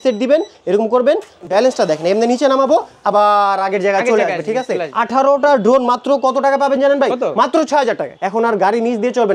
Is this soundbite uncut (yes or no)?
no